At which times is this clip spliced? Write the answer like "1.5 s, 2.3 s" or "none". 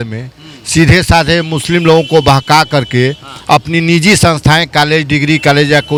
none